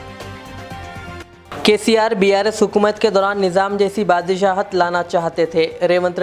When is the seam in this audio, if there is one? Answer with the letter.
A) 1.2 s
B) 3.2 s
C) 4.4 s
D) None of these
A